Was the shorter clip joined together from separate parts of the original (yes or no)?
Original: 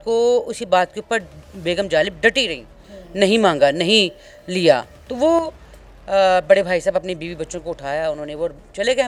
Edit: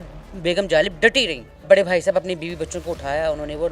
yes